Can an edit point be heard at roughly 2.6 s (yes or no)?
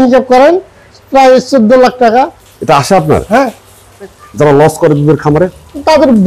no